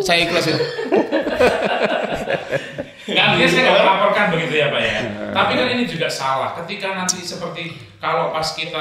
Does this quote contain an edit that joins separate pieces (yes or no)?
no